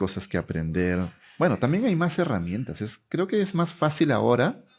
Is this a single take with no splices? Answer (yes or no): yes